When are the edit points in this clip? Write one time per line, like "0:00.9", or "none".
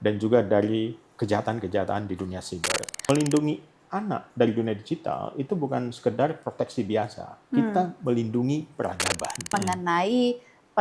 0:03.0
0:09.5

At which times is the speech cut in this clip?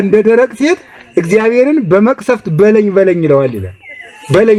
none

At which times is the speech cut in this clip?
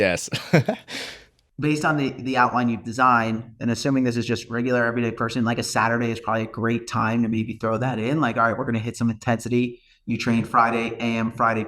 0:00.9

